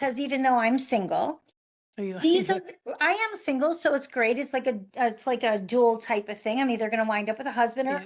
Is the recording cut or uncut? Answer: uncut